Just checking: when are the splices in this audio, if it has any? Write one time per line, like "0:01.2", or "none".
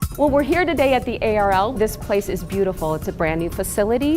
0:01.7